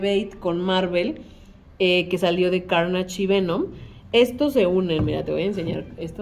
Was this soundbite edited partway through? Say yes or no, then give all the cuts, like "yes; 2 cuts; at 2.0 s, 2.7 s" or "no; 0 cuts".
no; 0 cuts